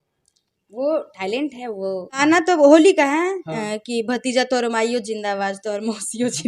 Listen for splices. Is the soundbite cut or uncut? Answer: cut